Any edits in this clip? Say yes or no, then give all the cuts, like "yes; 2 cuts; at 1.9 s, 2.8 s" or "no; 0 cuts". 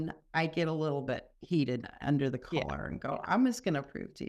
yes; 1 cut; at 1.3 s